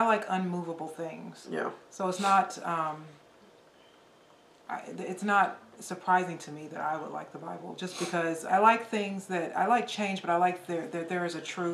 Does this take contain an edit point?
yes; 1 cut; at 8.5 s

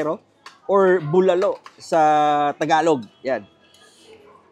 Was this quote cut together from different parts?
no; 0 cuts

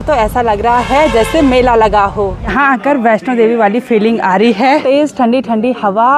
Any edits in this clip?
yes; 2 cuts; at 2.4 s, 4.8 s

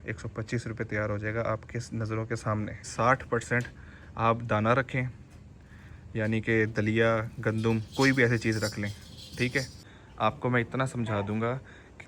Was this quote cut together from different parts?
yes; 2 cuts; at 2.9 s, 9.8 s

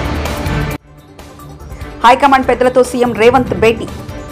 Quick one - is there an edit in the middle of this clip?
yes; 1 cut; at 0.9 s

